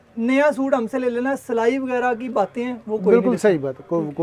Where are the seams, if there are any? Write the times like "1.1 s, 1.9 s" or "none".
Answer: none